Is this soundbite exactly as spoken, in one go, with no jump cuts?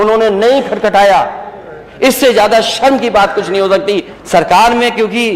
no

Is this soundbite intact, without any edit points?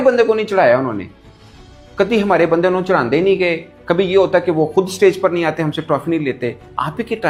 yes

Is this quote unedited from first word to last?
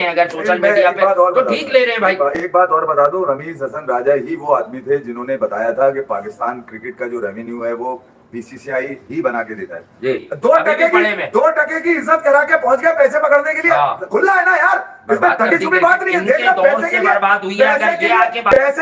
yes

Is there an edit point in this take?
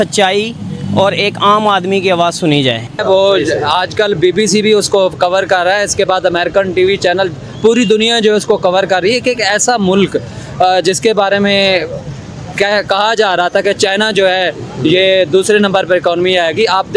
yes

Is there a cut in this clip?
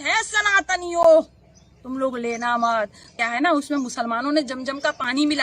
yes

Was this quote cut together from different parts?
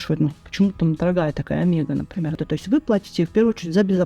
yes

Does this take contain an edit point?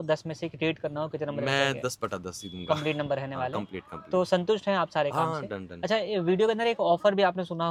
no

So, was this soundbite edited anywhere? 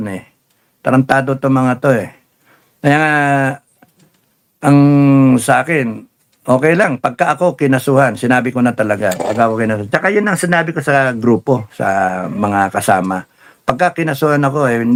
no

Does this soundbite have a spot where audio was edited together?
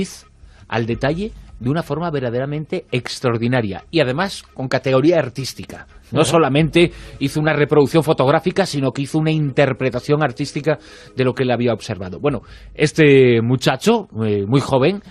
yes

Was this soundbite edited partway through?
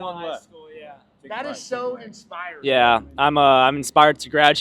no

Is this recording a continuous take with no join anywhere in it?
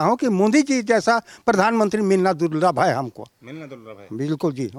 yes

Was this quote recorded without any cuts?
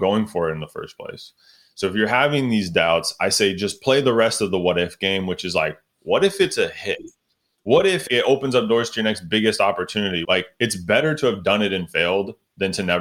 no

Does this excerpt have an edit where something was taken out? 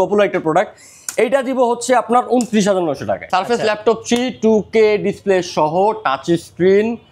yes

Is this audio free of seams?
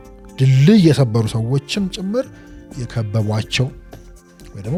yes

